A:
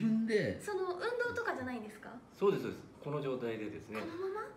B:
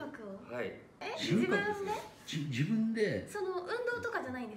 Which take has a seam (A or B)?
B